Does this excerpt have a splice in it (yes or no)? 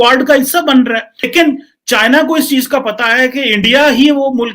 yes